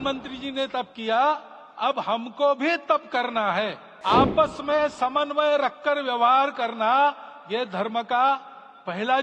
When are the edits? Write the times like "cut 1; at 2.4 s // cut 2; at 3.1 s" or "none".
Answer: cut 1; at 3.9 s